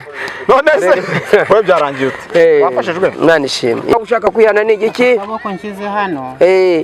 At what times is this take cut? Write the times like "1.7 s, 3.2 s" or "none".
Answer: 3.9 s